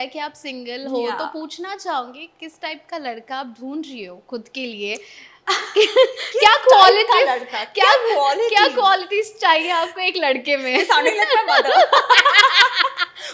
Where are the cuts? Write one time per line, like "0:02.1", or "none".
none